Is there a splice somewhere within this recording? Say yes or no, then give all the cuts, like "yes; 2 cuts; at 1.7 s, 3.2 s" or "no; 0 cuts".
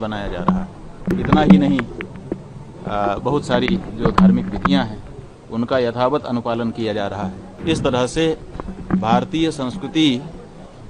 yes; 2 cuts; at 1.1 s, 7.5 s